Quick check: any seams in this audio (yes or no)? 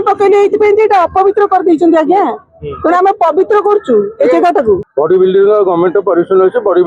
yes